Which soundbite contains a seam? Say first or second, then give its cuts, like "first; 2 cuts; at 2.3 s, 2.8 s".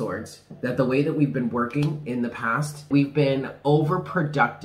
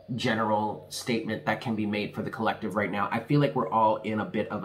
first; 1 cut; at 2.9 s